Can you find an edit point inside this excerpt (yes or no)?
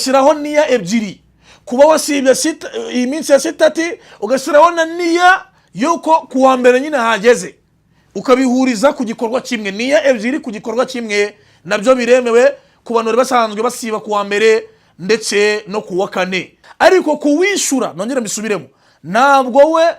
yes